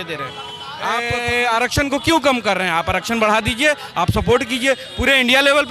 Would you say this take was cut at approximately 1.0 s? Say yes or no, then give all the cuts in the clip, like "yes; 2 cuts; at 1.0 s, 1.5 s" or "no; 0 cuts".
yes; 1 cut; at 1.0 s